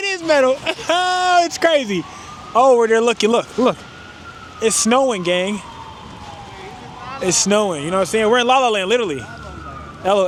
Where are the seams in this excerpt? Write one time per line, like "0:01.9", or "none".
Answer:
none